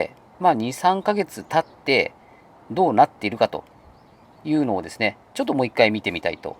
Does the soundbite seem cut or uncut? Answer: uncut